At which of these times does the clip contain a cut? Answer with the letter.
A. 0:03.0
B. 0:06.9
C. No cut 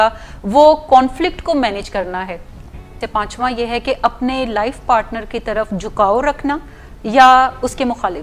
A